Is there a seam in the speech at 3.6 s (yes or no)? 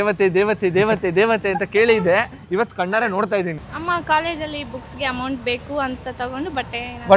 yes